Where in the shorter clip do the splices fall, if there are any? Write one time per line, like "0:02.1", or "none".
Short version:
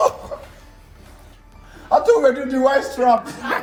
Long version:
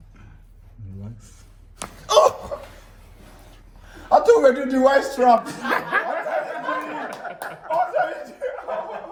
none